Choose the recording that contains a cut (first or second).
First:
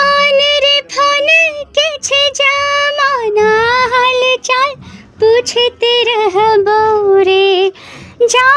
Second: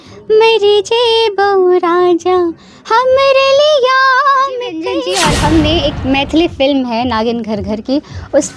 second